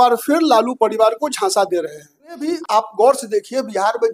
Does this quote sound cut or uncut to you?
cut